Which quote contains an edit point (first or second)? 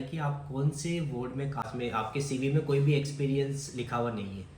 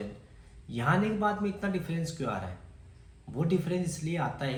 first